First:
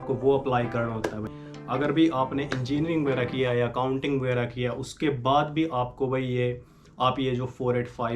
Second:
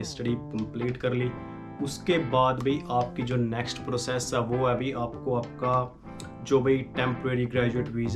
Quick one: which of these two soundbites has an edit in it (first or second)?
first